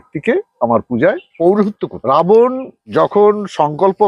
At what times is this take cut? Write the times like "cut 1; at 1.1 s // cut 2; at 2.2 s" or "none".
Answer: cut 1; at 1.3 s // cut 2; at 2.0 s // cut 3; at 2.7 s